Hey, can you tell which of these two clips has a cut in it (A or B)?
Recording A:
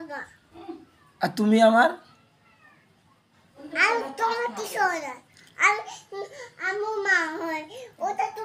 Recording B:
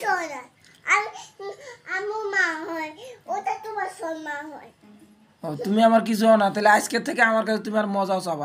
A